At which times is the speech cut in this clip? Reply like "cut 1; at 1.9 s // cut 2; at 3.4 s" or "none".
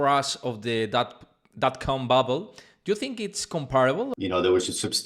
cut 1; at 4.1 s